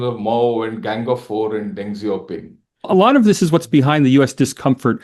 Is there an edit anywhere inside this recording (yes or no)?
yes